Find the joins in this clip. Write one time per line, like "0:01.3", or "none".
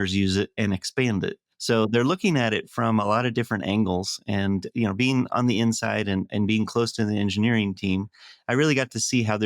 0:01.5